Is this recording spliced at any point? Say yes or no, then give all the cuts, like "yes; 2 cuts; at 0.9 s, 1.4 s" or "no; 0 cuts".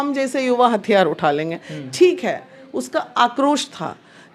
no; 0 cuts